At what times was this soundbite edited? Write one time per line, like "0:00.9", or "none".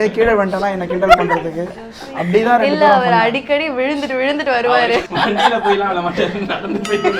0:05.0